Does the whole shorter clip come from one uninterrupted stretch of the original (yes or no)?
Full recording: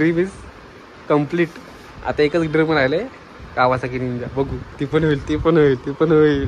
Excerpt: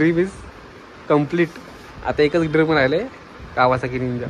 yes